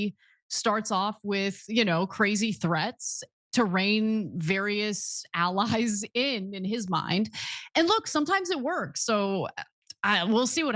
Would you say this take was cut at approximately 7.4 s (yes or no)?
yes